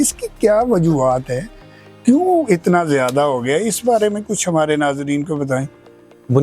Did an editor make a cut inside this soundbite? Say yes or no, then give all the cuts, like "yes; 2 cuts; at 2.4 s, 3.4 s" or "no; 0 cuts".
no; 0 cuts